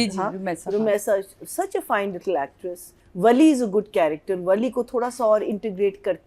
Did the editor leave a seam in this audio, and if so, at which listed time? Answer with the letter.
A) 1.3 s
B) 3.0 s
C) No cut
B